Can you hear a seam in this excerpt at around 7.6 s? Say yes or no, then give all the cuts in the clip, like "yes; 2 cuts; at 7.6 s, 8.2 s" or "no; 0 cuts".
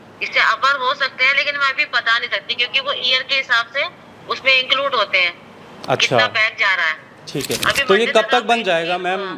yes; 1 cut; at 7.6 s